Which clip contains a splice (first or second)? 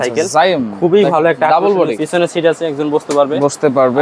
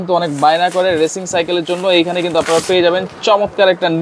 first